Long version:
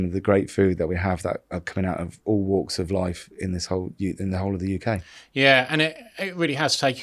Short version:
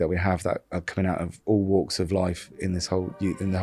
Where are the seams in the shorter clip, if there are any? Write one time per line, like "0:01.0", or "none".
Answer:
none